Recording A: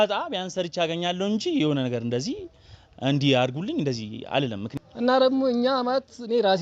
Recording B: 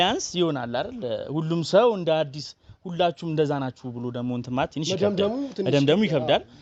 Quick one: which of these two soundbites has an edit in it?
A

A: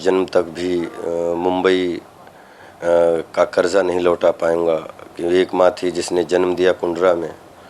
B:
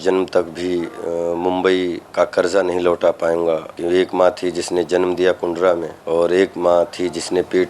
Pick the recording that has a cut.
B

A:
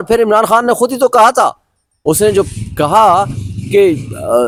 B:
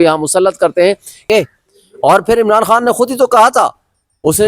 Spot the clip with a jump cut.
B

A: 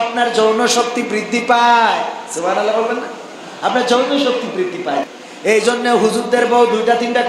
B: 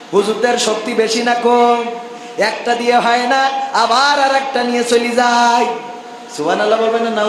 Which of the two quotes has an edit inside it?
A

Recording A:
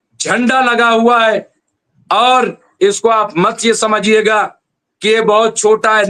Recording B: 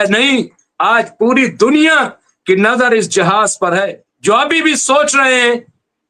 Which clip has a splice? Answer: B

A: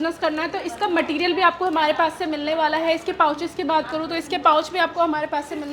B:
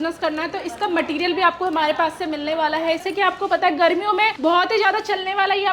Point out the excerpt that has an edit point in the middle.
B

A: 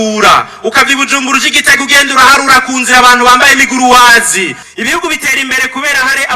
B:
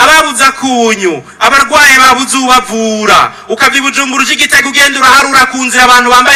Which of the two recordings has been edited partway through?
A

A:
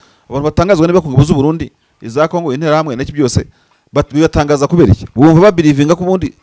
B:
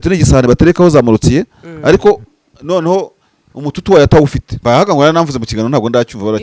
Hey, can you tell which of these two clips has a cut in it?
B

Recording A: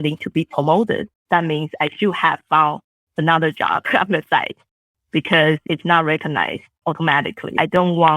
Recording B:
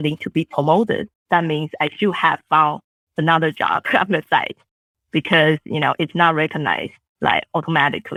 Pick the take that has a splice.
A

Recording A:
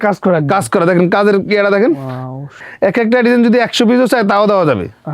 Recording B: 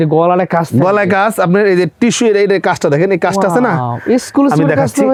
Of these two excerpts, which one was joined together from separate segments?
A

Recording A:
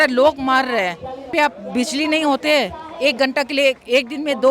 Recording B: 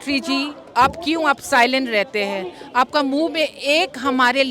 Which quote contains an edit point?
A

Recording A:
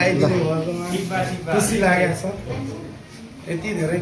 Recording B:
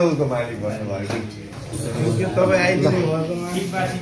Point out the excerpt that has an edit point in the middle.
B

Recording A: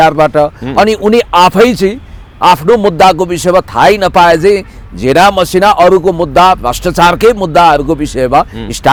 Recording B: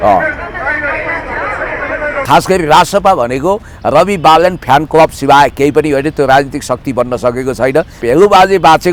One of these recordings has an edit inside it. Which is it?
B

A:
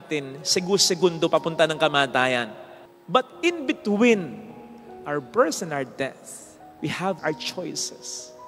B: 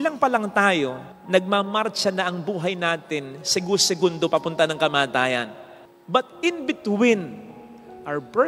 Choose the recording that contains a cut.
A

